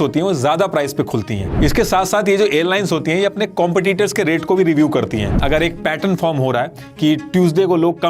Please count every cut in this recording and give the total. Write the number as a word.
two